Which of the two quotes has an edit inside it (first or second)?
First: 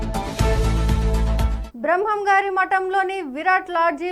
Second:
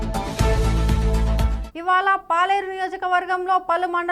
first